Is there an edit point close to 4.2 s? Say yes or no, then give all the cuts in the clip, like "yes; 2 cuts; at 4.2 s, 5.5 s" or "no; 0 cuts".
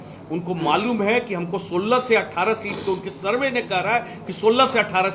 no; 0 cuts